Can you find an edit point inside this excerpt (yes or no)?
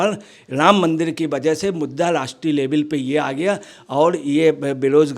no